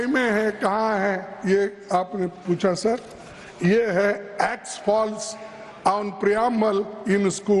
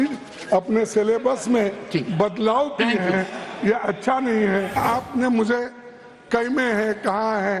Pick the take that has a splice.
second; 1 cut; at 4.7 s

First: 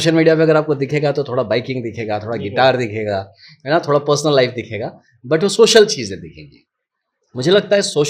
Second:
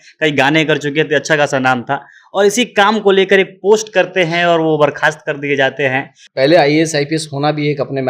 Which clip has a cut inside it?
second; 1 cut; at 6.2 s

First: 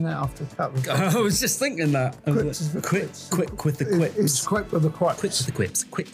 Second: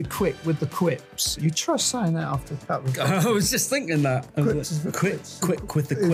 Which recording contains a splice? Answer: second; 1 cut; at 1.2 s

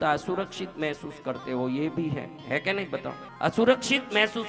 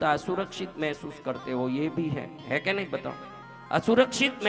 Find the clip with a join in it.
first; 1 cut; at 3.2 s

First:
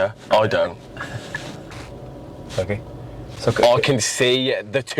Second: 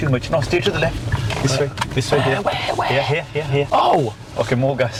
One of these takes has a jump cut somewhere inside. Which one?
first; 1 cut; at 1.8 s

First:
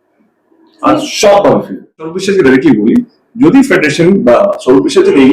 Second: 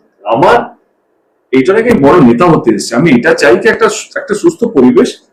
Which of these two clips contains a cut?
first; 1 cut; at 2.2 s

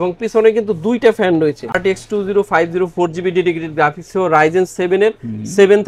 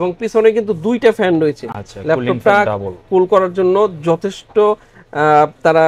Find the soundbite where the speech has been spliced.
first; 1 cut; at 1.8 s

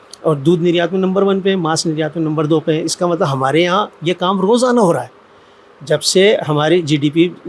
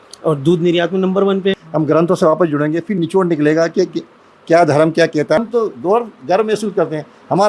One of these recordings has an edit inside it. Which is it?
second; 2 cuts; at 1.6 s, 5.4 s

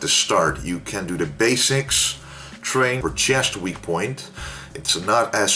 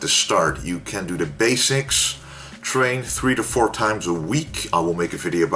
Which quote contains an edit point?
second; 1 cut; at 3.0 s

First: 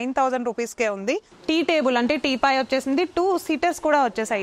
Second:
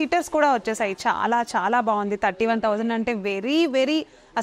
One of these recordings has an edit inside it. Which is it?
first; 1 cut; at 1.3 s

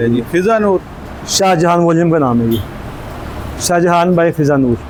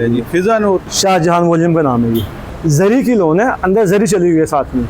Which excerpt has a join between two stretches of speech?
second; 2 cuts; at 0.9 s, 2.5 s

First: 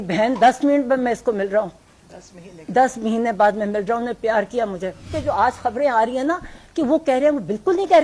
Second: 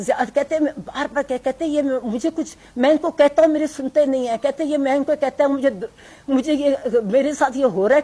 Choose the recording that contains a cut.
first; 1 cut; at 5.1 s

